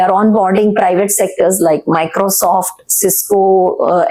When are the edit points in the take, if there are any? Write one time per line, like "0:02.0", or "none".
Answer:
none